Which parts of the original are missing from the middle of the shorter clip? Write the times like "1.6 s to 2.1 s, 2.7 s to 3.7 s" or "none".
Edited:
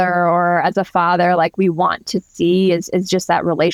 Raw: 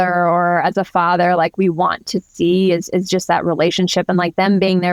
none